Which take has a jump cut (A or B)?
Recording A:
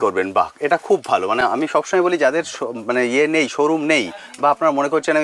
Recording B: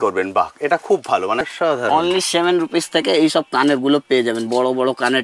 B